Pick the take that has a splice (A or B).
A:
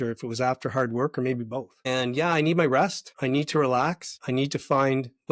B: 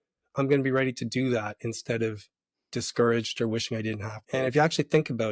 A